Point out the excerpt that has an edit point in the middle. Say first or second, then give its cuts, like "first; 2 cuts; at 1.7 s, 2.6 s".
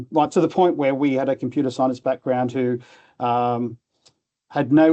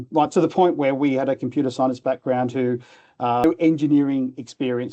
second; 1 cut; at 3.4 s